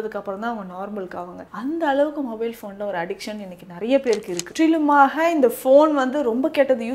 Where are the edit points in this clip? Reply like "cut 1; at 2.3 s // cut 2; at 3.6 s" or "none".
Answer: cut 1; at 4.5 s